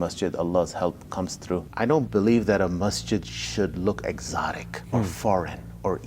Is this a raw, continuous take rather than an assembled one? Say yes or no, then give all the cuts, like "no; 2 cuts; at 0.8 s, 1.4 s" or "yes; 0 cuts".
no; 1 cut; at 1.7 s